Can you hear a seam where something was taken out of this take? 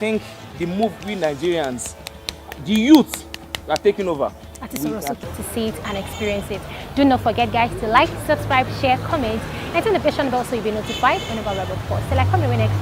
yes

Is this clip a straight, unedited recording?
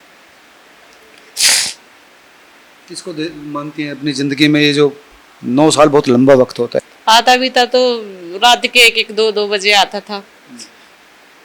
no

